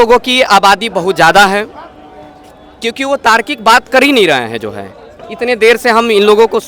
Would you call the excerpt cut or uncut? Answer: uncut